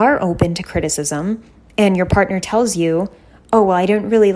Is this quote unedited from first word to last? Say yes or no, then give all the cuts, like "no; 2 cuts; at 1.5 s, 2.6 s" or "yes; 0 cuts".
yes; 0 cuts